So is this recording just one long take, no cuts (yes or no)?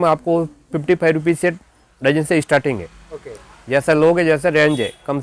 yes